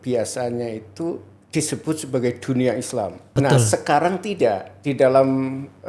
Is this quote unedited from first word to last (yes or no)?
no